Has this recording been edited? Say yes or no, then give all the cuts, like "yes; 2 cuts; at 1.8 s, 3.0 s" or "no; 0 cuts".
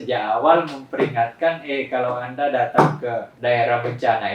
yes; 1 cut; at 3.3 s